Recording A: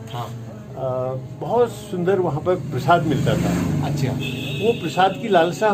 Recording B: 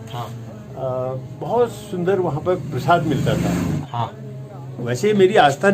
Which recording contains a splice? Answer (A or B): B